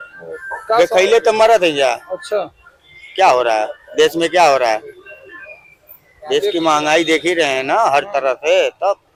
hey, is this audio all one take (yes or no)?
yes